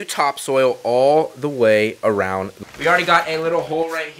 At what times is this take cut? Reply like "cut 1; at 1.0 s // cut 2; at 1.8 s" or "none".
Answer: cut 1; at 2.5 s